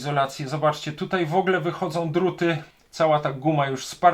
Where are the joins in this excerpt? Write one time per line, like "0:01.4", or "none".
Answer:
0:02.7